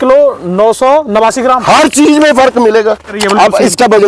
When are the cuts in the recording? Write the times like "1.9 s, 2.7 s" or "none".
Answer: 3.2 s